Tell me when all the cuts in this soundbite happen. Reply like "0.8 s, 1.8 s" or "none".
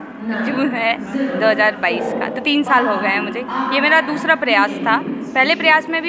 none